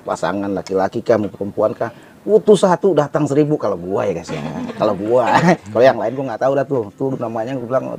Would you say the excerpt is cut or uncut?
uncut